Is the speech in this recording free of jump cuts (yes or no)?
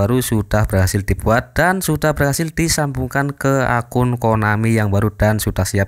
yes